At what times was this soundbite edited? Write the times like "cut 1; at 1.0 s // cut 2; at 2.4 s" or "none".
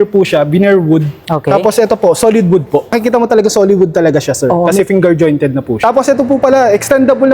cut 1; at 3.0 s // cut 2; at 5.7 s